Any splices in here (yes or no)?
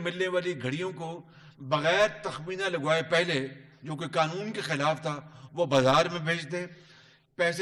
no